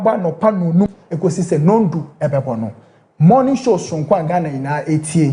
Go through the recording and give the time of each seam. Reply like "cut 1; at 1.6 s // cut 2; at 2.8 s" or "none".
cut 1; at 1.0 s